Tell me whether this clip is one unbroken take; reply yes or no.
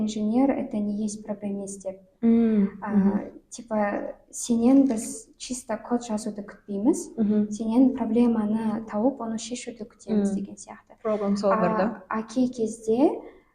yes